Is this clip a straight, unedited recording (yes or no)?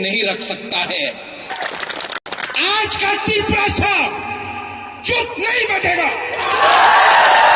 no